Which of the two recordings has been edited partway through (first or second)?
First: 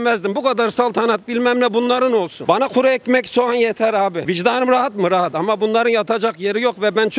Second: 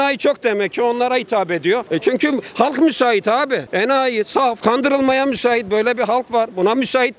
second